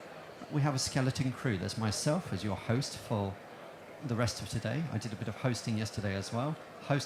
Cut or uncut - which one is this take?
uncut